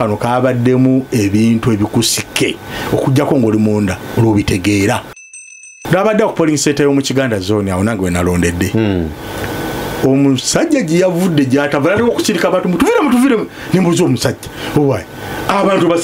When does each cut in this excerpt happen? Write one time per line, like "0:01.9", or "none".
0:05.3